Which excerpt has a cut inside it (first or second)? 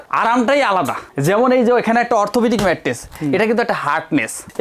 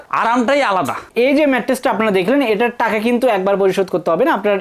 second